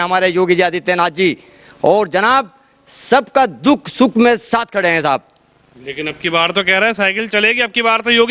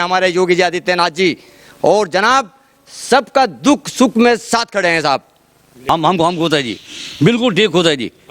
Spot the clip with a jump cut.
second; 1 cut; at 5.9 s

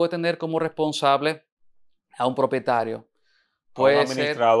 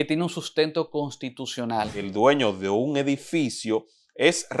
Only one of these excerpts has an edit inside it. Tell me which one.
second; 1 cut; at 2.1 s

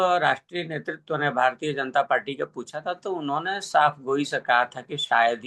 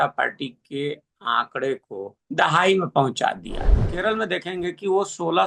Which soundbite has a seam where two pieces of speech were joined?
second; 2 cuts; at 2.2 s, 3.9 s

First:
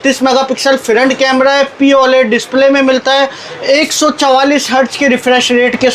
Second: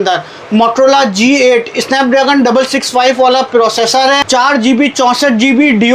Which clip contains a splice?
second; 2 cuts; at 1.9 s, 4.2 s

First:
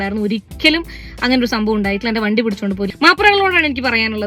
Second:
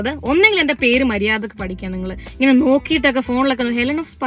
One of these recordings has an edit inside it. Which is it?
first; 1 cut; at 2.9 s

